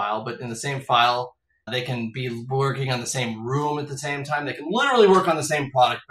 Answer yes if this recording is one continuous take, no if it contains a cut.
no